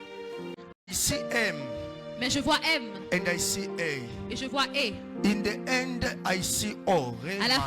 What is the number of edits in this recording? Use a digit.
1